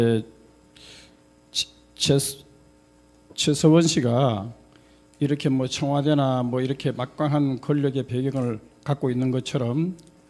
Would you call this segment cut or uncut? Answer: cut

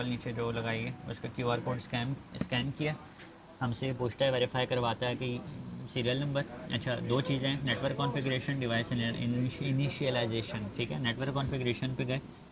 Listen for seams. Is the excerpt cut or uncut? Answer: uncut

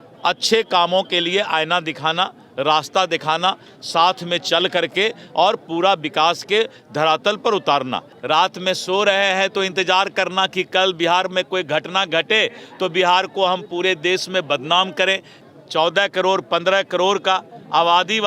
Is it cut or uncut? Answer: cut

